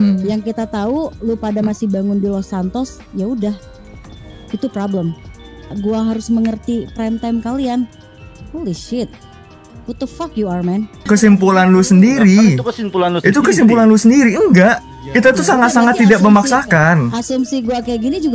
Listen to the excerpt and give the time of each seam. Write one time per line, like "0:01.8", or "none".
0:05.7
0:11.1